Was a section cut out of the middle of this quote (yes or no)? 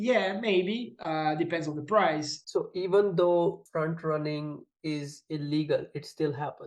yes